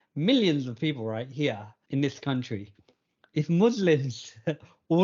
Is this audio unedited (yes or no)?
no